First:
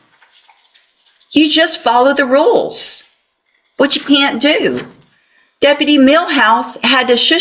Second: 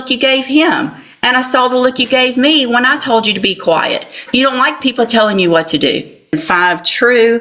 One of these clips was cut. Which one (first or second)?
second